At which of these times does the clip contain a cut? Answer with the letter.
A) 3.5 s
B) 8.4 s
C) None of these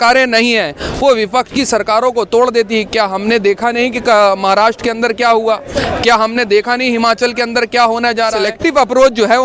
B